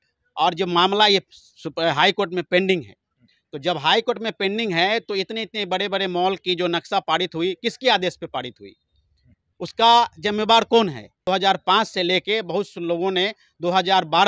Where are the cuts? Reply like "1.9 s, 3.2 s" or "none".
11.1 s

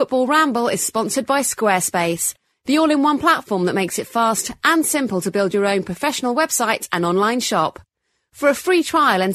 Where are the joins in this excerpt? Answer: none

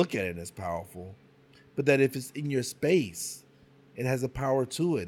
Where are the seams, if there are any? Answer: none

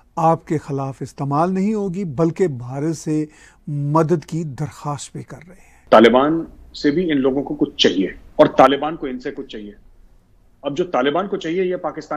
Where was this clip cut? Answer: 5.7 s, 8.2 s

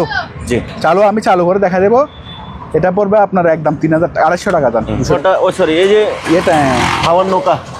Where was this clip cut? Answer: 5.1 s

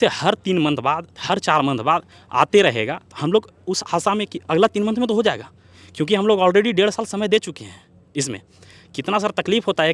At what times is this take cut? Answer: none

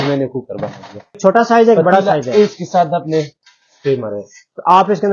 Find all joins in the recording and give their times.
1.1 s

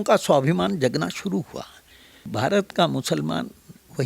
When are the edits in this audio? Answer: 2.3 s

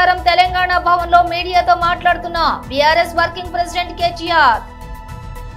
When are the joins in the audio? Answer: none

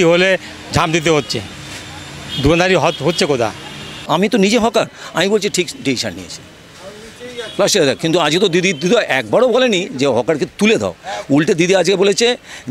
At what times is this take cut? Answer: 4.1 s

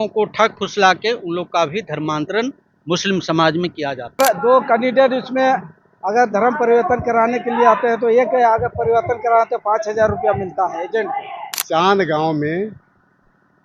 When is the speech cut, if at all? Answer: 4.2 s, 11.6 s

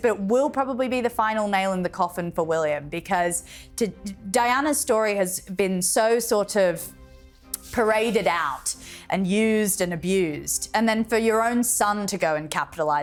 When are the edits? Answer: none

